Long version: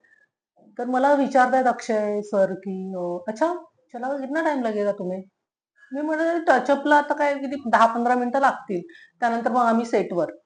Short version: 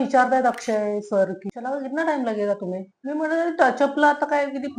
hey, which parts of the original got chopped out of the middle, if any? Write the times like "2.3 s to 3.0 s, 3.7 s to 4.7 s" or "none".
2.7 s to 3.8 s, 5.3 s to 5.8 s